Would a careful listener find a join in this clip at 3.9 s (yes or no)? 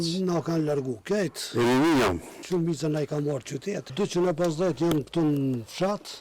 yes